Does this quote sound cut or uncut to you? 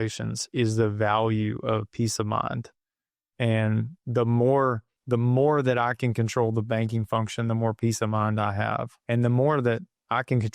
cut